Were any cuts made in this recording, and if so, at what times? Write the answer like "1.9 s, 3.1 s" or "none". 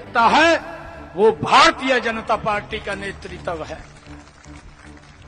none